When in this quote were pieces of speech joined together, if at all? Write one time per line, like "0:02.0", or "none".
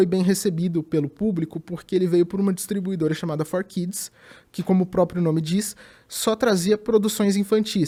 none